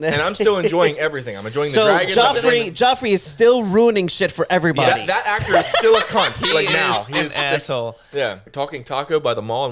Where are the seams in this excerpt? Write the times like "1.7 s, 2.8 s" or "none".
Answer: 8.4 s